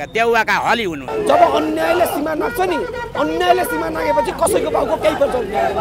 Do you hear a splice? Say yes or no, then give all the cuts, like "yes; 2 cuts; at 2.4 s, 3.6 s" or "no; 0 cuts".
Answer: yes; 1 cut; at 1.0 s